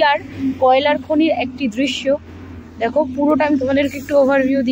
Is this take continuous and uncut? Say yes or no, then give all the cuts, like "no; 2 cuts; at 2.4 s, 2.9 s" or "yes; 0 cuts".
yes; 0 cuts